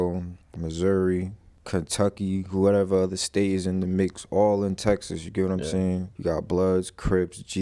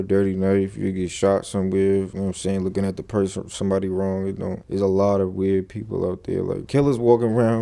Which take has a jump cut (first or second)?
second